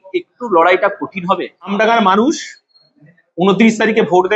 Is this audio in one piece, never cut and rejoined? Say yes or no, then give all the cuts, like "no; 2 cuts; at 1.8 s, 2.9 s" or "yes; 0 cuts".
no; 1 cut; at 1.7 s